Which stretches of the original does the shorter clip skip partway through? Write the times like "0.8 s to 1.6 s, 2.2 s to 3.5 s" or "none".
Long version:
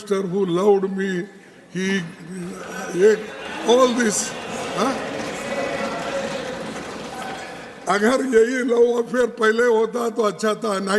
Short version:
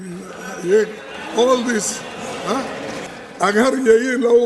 5.4 s to 7.5 s